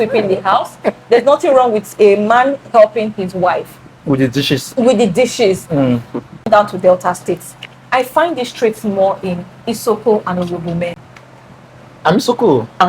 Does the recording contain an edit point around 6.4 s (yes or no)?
yes